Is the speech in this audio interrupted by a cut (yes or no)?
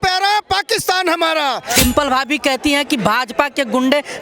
yes